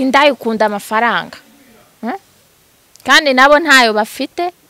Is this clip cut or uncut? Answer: uncut